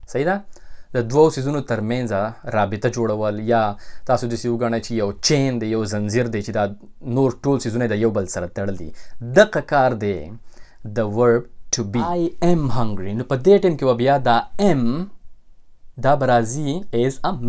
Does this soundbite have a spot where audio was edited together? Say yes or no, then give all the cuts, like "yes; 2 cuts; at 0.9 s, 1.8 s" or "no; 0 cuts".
yes; 1 cut; at 12.1 s